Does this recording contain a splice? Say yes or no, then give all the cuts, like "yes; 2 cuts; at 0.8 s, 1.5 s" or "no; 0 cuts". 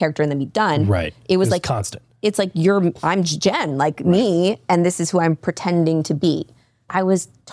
no; 0 cuts